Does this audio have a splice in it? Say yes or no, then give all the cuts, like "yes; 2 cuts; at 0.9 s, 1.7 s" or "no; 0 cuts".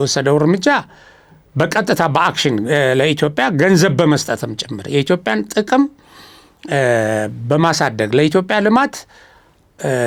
no; 0 cuts